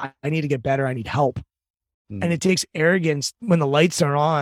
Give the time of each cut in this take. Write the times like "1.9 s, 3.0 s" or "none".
3.3 s